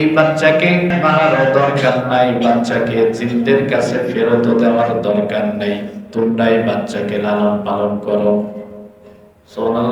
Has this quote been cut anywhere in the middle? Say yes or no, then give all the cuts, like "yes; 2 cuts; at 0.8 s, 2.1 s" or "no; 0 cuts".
yes; 1 cut; at 0.9 s